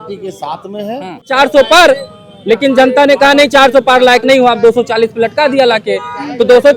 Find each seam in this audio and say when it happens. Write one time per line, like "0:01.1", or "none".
0:01.3